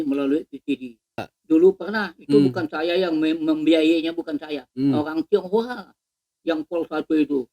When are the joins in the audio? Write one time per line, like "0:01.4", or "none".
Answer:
0:01.3